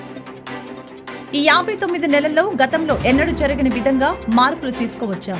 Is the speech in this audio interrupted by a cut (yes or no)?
no